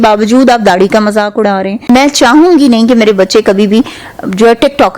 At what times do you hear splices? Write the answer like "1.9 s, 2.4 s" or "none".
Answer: 1.9 s